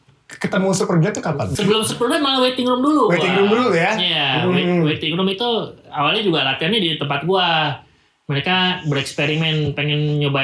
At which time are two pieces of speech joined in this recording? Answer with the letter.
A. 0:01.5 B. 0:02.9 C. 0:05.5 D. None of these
A